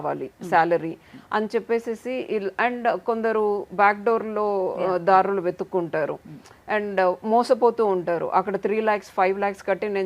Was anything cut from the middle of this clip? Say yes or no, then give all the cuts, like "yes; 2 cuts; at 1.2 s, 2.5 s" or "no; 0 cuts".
no; 0 cuts